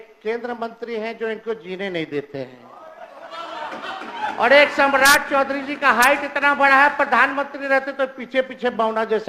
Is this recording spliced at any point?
no; 0 cuts

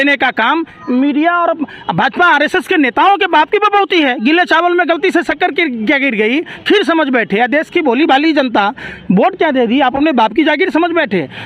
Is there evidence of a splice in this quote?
no; 0 cuts

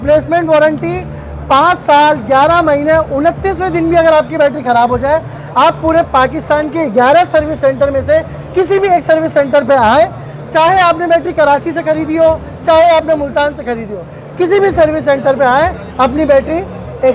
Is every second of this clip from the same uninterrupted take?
yes; 0 cuts

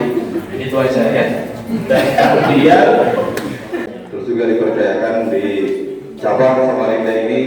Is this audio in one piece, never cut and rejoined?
no; 1 cut; at 3.9 s

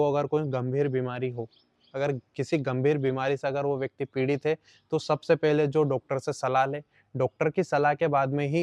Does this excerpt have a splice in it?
no; 0 cuts

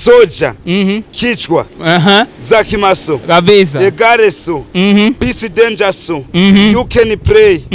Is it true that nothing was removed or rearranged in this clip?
yes; 0 cuts

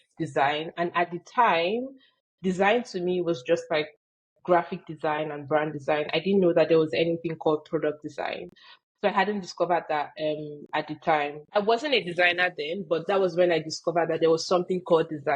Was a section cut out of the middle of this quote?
yes; 1 cut; at 11.4 s

